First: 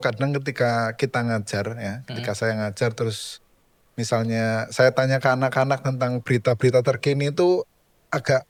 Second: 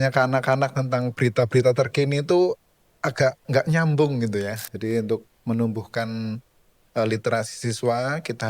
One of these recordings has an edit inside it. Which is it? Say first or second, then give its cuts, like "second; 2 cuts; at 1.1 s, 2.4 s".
second; 1 cut; at 4.7 s